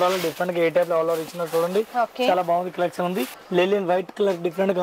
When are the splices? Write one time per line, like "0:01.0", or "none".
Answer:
0:03.3